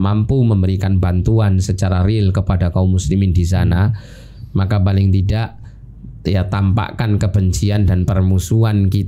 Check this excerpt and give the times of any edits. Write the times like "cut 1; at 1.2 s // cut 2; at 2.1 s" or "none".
none